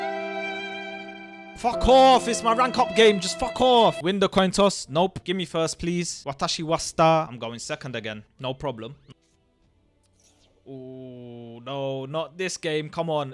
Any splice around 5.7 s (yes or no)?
no